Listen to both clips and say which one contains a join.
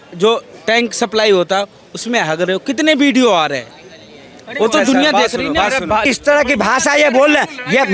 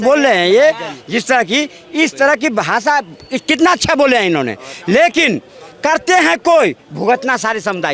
first; 1 cut; at 6.0 s

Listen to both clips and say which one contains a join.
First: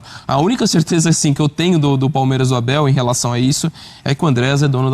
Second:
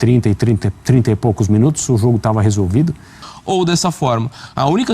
second; 1 cut; at 3.3 s

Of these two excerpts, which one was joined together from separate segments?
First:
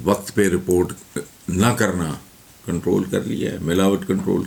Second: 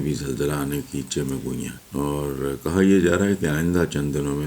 second; 1 cut; at 1.8 s

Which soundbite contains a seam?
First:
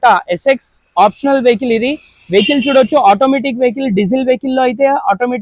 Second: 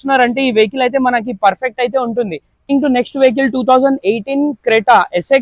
second; 1 cut; at 2.7 s

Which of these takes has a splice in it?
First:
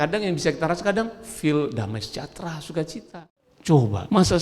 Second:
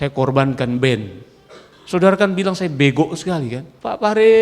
first; 1 cut; at 3.1 s

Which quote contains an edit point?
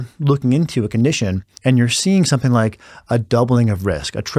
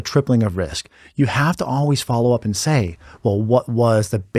first; 1 cut; at 1.5 s

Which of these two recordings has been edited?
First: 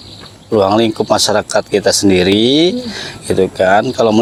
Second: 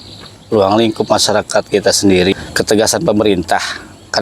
second; 1 cut; at 2.3 s

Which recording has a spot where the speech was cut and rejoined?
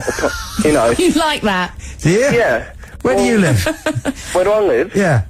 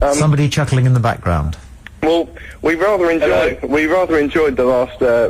first; 1 cut; at 3.8 s

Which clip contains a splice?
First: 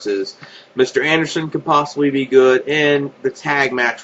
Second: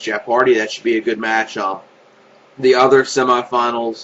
second; 1 cut; at 1.6 s

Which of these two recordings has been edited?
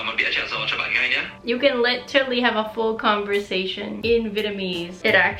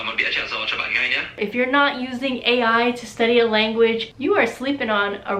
second; 2 cuts; at 1.3 s, 4.1 s

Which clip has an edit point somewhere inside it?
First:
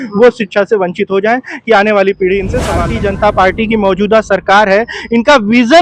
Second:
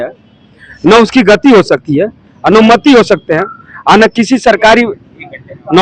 first; 1 cut; at 2.8 s

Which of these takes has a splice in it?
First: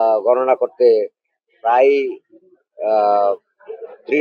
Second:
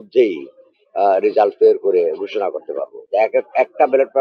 second; 1 cut; at 2.9 s

